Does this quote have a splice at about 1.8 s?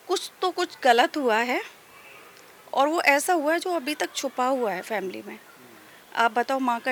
no; 0 cuts

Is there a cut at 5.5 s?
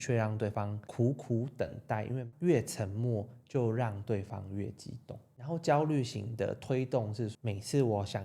no; 2 cuts; at 2.2 s, 7.3 s

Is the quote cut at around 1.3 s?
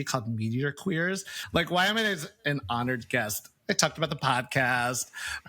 yes; 1 cut; at 1.3 s

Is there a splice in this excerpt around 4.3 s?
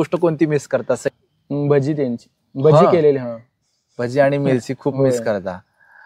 no; 1 cut; at 1.1 s

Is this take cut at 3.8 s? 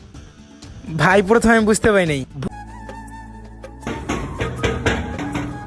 no; 1 cut; at 2.3 s

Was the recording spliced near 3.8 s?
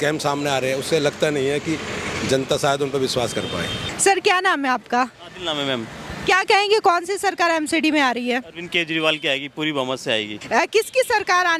yes; 2 cuts; at 3.8 s, 10.4 s

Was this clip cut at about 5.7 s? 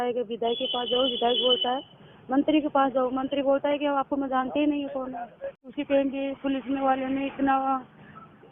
yes; 1 cut; at 5.7 s

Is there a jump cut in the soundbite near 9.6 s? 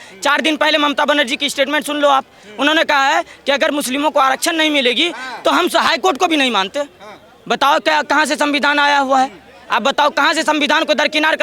no; 0 cuts

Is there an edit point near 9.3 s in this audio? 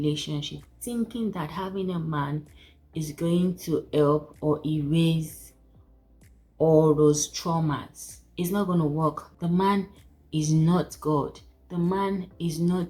no; 0 cuts

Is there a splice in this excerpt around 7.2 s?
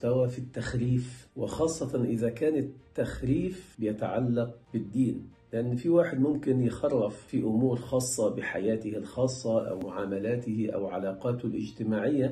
no; 0 cuts

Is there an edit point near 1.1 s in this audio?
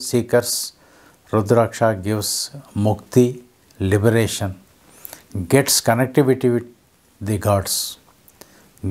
no; 0 cuts

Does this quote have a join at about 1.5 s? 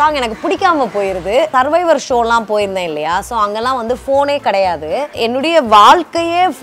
yes; 2 cuts; at 1.5 s, 5.1 s

